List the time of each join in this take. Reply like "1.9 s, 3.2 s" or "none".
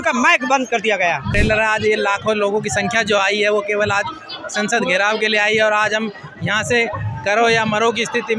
1.3 s